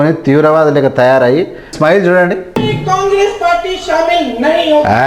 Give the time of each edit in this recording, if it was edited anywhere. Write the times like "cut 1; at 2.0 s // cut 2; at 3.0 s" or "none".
cut 1; at 1.7 s // cut 2; at 2.5 s